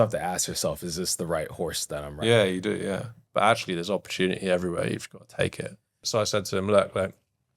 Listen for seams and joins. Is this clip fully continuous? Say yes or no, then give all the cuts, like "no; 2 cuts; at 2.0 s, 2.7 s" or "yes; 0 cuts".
no; 2 cuts; at 3.1 s, 5.9 s